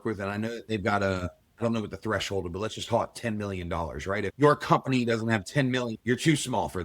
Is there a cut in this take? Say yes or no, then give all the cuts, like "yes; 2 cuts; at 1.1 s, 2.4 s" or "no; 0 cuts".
yes; 2 cuts; at 4.3 s, 6.0 s